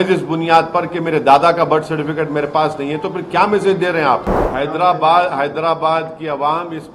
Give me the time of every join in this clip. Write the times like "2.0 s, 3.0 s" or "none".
4.4 s

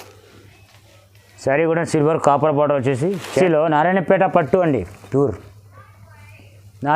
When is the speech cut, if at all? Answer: 3.3 s

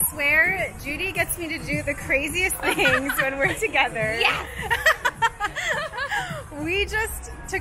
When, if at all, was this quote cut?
none

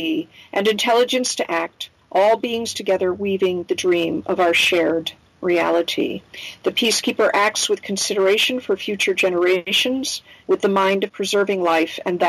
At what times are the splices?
10.0 s, 11.1 s

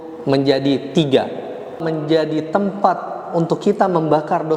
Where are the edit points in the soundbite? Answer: 1.8 s

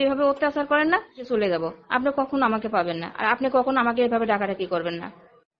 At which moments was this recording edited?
1.3 s

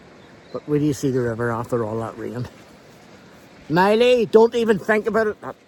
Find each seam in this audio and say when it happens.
none

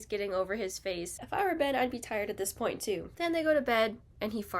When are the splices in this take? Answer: 1.2 s

